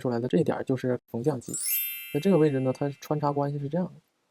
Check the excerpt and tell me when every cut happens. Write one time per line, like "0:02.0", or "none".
0:01.0